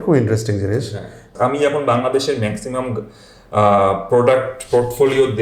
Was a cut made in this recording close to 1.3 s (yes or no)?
yes